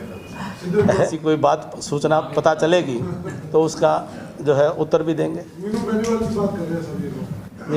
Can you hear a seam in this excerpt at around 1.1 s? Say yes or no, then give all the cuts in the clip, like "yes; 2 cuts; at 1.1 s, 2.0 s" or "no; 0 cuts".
yes; 1 cut; at 1.1 s